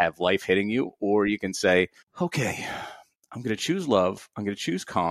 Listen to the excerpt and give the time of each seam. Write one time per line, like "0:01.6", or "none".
none